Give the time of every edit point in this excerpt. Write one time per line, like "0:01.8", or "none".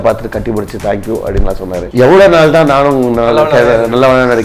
0:01.8